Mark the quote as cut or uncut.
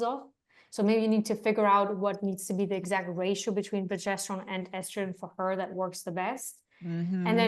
uncut